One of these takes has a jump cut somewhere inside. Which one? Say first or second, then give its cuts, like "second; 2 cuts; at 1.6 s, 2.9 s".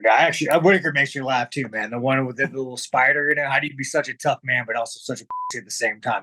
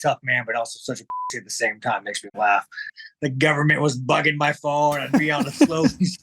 second; 1 cut; at 3.0 s